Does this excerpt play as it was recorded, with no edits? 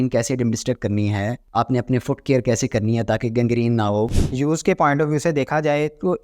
no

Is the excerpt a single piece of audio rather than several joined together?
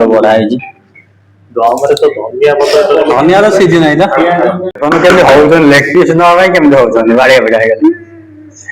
no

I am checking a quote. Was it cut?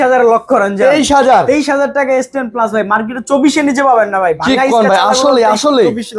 no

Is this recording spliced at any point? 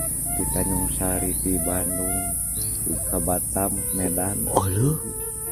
no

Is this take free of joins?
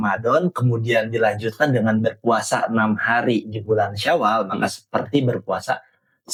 yes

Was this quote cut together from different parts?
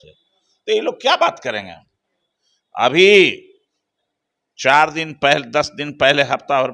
no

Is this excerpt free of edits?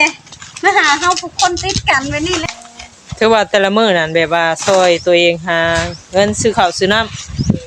no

